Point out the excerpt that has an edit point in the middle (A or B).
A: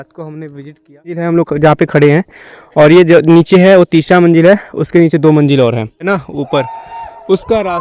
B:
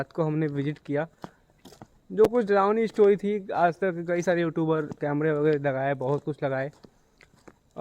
A